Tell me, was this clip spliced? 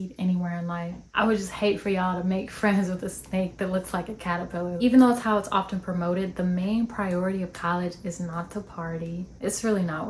yes; 3 cuts; at 1.0 s, 4.8 s, 9.3 s

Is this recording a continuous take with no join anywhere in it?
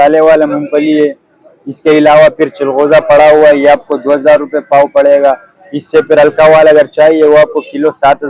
yes; 0 cuts

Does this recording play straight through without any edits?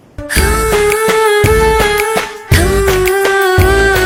yes; 0 cuts

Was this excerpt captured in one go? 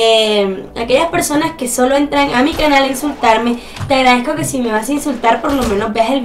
no; 1 cut; at 1.9 s

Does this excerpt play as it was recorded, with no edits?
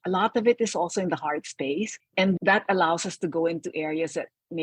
yes; 0 cuts

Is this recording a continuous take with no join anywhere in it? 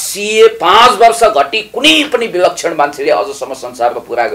yes; 0 cuts

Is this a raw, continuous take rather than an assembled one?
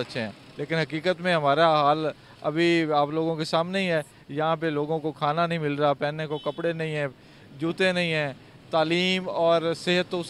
yes; 0 cuts

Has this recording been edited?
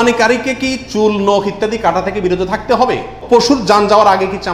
yes; 1 cut; at 3.1 s

